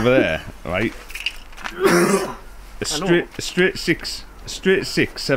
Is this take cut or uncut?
uncut